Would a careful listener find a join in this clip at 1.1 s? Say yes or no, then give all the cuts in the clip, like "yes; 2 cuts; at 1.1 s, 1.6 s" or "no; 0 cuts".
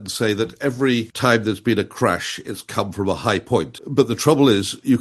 yes; 2 cuts; at 1.1 s, 3.8 s